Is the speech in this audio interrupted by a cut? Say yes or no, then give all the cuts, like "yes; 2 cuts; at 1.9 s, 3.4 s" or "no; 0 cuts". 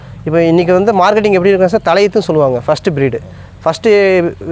no; 0 cuts